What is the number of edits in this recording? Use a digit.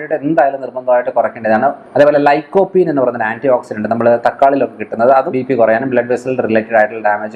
2